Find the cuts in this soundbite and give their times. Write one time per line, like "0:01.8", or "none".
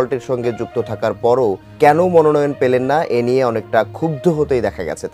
0:01.7